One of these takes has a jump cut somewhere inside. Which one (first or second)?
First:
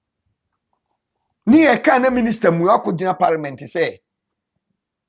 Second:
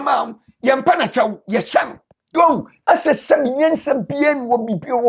second